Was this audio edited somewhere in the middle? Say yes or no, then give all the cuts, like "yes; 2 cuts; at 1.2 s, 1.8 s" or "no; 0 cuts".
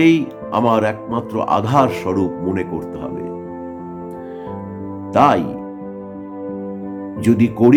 no; 0 cuts